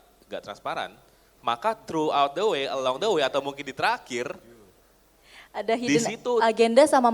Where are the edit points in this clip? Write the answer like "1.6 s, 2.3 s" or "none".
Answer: none